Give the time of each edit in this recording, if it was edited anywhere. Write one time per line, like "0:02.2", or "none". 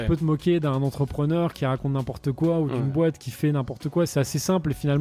none